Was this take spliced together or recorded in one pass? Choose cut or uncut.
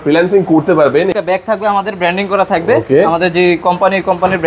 cut